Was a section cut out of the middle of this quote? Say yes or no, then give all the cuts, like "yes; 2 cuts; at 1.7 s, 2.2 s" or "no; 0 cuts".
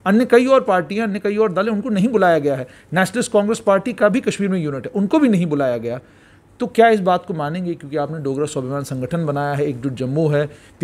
no; 0 cuts